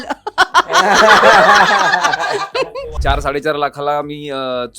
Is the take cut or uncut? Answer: cut